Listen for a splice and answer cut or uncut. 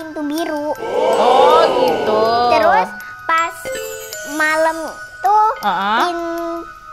uncut